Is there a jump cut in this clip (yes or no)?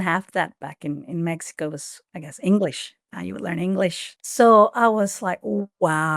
yes